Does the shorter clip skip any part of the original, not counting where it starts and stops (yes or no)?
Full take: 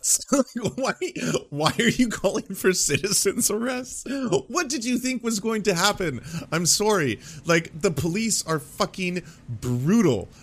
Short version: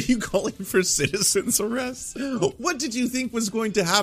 no